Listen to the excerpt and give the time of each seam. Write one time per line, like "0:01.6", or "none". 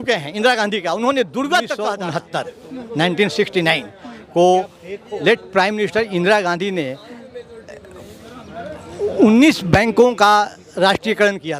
0:02.0